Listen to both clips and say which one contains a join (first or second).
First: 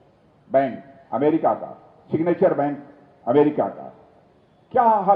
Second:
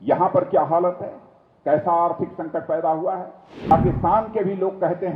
second